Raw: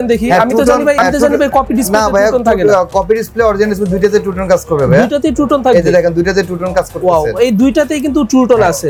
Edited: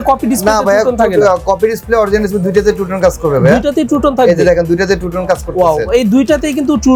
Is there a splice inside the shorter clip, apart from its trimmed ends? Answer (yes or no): no